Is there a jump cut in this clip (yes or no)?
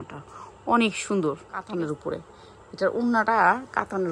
yes